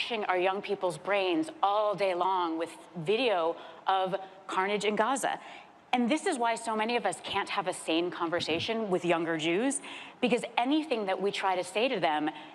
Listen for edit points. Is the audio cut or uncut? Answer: uncut